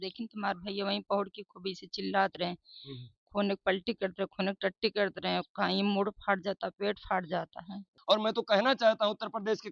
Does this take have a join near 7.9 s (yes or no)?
yes